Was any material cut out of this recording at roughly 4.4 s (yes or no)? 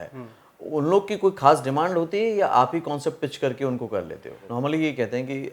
yes